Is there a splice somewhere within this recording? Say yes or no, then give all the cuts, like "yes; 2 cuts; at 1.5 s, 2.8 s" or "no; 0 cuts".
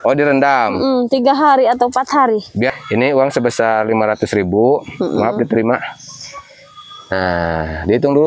yes; 1 cut; at 2.7 s